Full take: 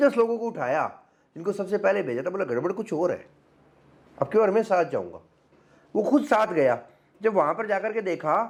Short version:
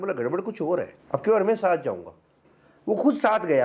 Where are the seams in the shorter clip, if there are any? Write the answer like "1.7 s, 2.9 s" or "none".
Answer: 1.0 s